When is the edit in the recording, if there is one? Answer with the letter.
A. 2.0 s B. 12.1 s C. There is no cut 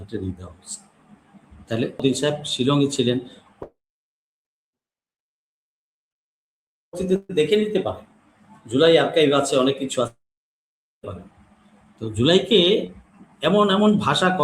A